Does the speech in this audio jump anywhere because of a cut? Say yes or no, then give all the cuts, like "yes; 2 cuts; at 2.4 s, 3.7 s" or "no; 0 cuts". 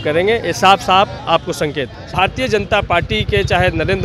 yes; 1 cut; at 2.1 s